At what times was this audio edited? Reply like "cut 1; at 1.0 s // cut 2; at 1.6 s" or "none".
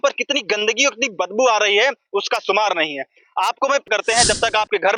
cut 1; at 3.9 s

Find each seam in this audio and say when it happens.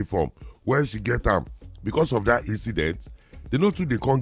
cut 1; at 1.6 s

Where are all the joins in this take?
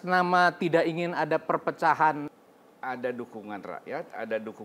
cut 1; at 2.3 s

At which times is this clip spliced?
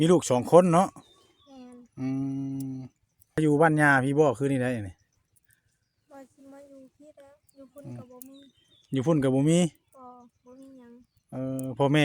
cut 1; at 3.4 s

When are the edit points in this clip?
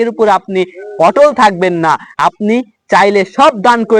none

